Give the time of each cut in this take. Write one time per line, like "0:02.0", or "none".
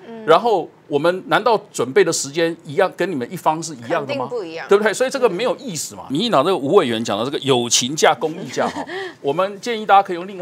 0:06.1